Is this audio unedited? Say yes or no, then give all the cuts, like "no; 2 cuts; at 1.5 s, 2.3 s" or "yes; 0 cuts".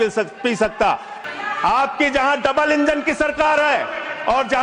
no; 1 cut; at 1.1 s